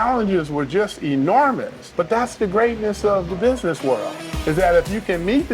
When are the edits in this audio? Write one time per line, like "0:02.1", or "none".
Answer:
0:01.8
0:04.2